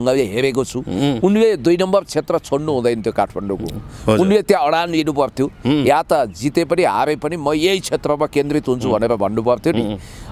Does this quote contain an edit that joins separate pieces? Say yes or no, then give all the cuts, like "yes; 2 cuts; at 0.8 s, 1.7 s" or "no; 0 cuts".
no; 0 cuts